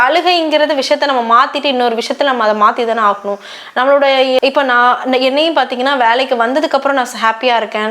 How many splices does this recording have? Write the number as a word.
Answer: one